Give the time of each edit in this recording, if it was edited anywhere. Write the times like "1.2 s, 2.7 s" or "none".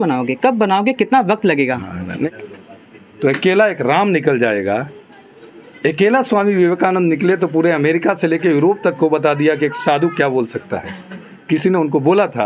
2.3 s